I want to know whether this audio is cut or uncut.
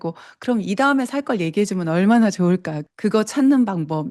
cut